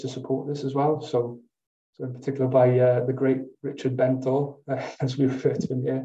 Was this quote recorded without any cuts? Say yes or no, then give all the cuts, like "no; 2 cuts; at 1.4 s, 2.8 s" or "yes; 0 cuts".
yes; 0 cuts